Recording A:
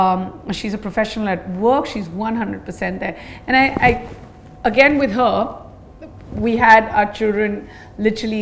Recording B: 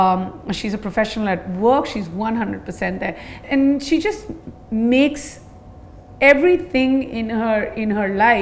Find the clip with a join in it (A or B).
B